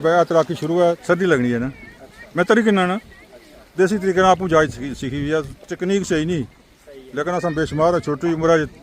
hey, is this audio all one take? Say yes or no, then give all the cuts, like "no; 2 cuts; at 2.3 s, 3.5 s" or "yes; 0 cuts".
no; 1 cut; at 1.0 s